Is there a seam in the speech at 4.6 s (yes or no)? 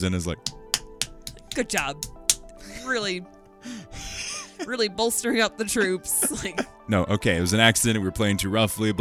no